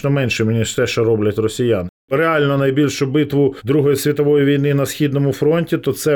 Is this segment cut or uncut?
cut